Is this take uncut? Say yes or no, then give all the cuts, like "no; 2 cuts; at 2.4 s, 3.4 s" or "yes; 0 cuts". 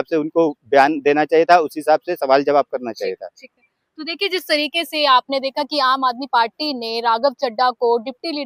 yes; 0 cuts